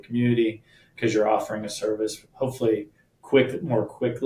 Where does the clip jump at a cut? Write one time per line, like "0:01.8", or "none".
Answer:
none